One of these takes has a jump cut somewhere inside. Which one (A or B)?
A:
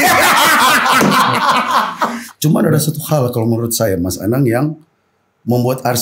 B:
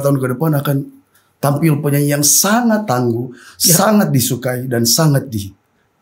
A